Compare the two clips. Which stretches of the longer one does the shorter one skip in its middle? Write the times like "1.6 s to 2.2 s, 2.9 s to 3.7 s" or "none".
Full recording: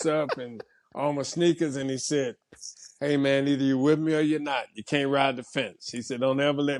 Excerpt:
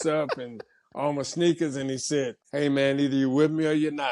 2.4 s to 2.9 s